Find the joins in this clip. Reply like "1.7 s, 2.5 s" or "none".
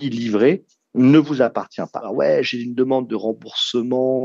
2.1 s

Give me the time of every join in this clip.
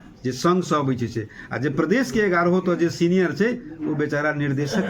none

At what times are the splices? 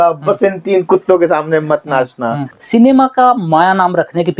2.5 s

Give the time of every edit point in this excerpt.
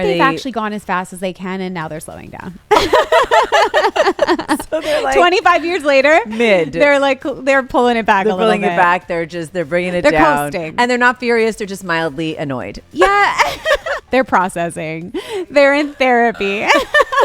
14.0 s

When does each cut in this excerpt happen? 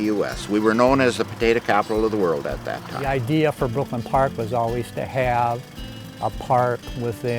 2.9 s

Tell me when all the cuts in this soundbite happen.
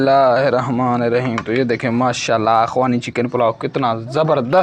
none

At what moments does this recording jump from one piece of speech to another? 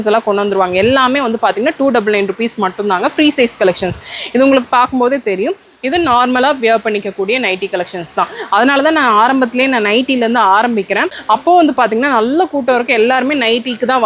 11.1 s

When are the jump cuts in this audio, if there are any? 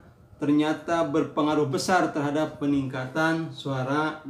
none

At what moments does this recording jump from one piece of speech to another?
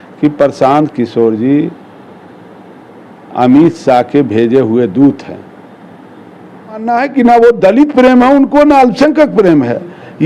6.9 s

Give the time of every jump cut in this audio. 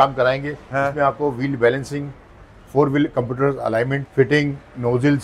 4.0 s

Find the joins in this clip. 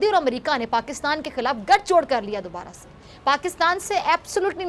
none

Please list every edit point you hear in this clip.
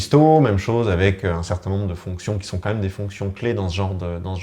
none

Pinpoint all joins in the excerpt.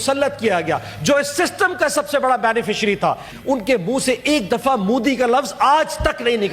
3.3 s

